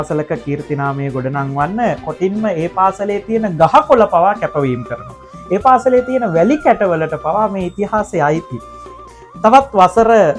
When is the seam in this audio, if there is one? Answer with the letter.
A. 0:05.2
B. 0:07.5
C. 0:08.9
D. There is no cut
C